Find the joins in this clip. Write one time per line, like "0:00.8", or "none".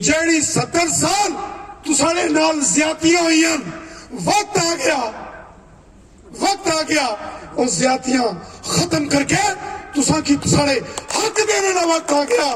none